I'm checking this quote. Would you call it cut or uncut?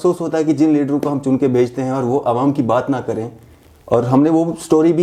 uncut